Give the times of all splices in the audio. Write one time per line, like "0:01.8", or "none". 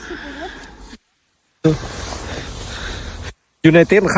none